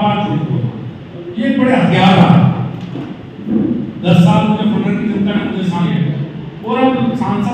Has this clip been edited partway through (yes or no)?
yes